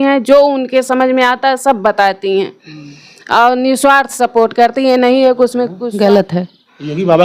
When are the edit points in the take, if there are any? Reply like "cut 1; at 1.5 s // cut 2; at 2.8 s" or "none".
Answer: cut 1; at 5.8 s